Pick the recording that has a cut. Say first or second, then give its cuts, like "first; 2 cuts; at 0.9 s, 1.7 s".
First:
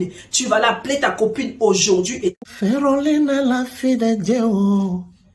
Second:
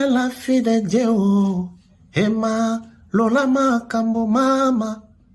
first; 1 cut; at 2.4 s